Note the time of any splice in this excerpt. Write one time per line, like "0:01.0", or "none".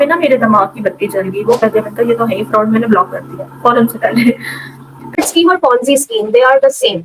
0:01.6
0:05.1